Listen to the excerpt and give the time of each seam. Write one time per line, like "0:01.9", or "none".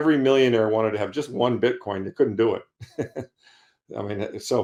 none